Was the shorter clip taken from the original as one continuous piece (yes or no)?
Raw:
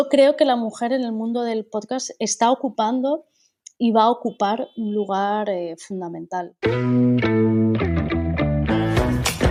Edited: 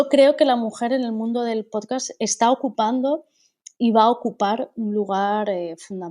yes